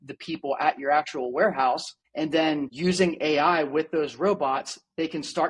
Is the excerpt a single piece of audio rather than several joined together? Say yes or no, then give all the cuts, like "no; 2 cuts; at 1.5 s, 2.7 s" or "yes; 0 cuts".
yes; 0 cuts